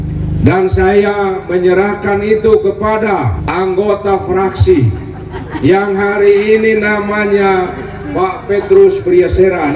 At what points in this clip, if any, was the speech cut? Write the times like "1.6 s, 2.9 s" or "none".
3.4 s